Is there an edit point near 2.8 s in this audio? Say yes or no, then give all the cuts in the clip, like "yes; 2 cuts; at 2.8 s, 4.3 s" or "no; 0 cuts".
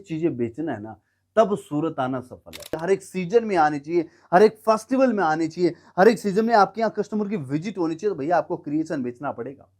yes; 1 cut; at 2.8 s